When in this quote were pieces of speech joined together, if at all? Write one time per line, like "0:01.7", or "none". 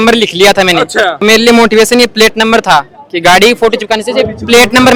none